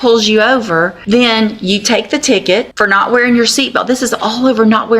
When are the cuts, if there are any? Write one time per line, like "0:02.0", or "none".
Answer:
0:01.0
0:02.7